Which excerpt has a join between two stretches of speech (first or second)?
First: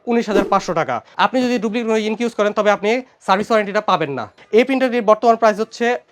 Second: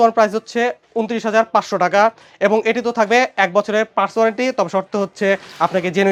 first